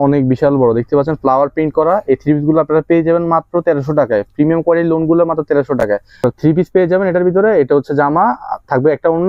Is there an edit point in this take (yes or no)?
no